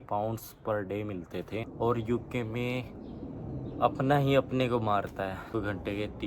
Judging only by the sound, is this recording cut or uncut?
cut